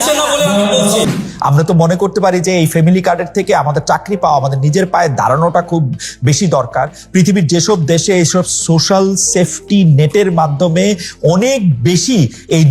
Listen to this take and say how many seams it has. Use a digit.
1